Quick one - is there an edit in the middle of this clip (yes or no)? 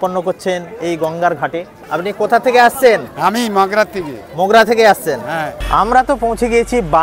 yes